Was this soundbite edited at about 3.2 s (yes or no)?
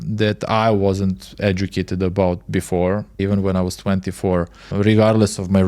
yes